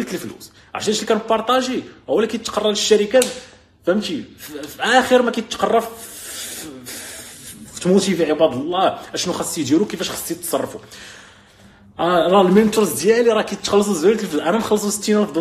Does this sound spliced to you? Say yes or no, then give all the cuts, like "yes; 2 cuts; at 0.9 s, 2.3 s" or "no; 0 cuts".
no; 0 cuts